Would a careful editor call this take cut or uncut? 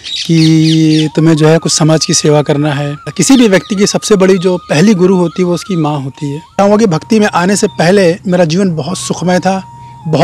cut